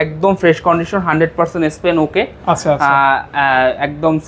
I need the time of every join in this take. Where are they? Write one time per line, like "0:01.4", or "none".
none